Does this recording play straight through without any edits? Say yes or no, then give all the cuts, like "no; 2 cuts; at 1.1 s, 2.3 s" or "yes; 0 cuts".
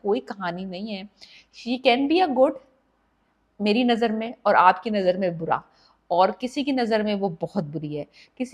yes; 0 cuts